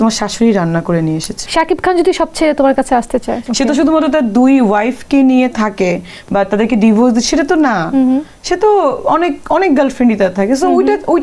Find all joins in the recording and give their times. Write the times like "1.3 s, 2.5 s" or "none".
1.4 s, 3.4 s

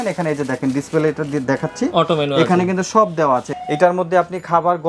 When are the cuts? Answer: 3.5 s

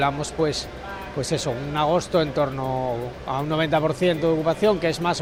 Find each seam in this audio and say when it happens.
none

